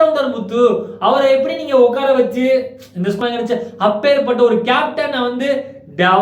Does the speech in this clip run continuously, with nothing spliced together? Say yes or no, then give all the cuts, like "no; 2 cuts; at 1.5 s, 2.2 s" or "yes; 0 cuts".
no; 1 cut; at 3.2 s